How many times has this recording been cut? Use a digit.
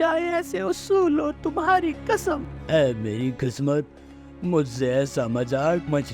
1